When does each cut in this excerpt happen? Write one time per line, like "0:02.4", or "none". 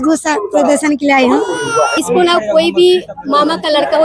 0:01.9